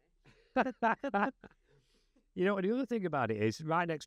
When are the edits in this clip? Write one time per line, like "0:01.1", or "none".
none

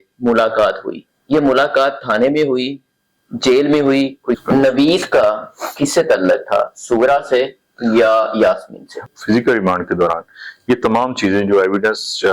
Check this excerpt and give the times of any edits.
0:04.4
0:09.1

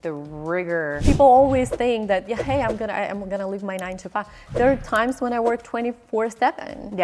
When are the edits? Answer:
0:01.0

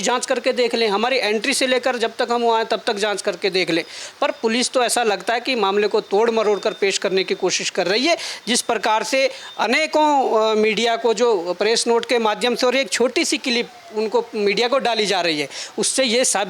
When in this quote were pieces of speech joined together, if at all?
none

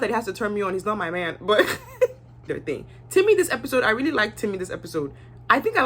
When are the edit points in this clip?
0:02.5

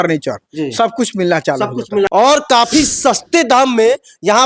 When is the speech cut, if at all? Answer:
0:02.1

